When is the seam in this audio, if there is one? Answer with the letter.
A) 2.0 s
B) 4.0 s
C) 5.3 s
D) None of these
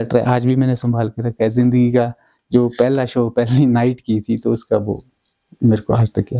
D